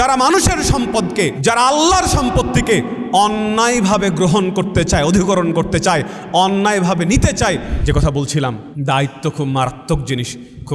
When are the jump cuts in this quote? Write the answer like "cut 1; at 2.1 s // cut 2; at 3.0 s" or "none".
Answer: cut 1; at 1.4 s // cut 2; at 7.7 s // cut 3; at 8.7 s